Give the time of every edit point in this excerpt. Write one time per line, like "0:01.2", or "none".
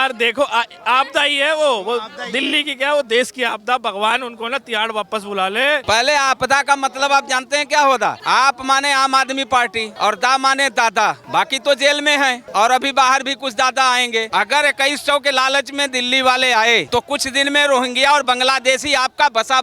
0:05.8
0:08.2
0:09.8
0:11.2
0:12.4
0:14.3
0:16.9